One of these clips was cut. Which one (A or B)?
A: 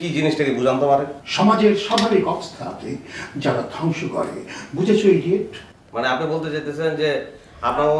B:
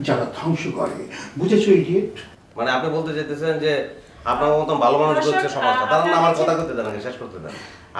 A